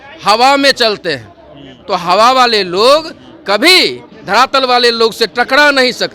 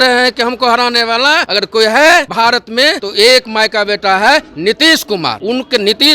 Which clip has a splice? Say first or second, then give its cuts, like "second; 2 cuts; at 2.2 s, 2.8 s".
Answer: second; 3 cuts; at 1.5 s, 2.7 s, 5.4 s